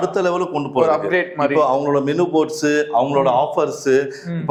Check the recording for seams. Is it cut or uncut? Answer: uncut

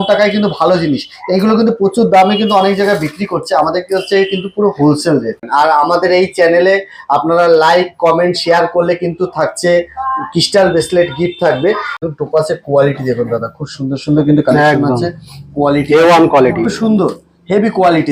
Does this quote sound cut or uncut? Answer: cut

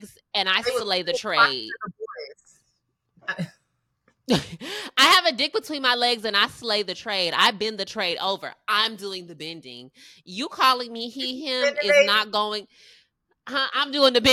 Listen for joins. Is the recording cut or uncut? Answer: uncut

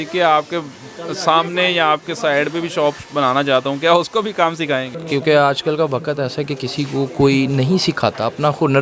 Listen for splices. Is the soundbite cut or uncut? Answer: cut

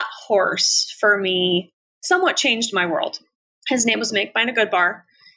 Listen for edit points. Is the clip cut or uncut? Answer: uncut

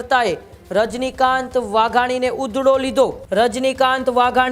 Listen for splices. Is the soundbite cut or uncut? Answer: cut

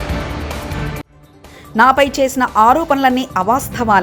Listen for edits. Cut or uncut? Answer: uncut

